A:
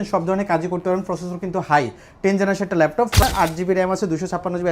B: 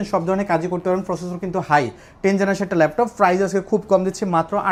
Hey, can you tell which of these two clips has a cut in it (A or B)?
A